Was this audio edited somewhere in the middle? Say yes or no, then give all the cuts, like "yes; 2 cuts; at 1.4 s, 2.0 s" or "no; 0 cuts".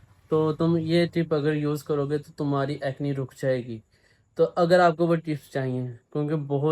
no; 0 cuts